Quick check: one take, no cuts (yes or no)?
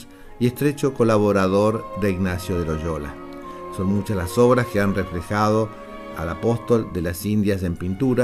no